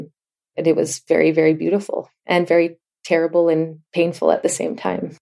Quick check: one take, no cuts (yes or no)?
yes